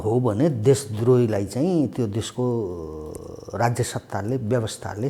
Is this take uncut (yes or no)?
yes